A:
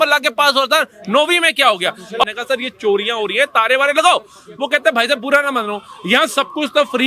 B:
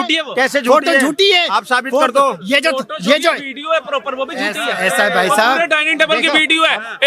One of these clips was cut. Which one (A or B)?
A